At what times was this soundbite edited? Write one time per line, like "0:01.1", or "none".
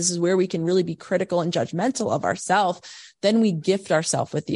none